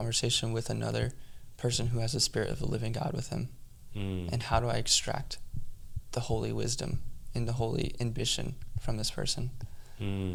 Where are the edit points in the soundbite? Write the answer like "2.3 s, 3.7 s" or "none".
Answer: none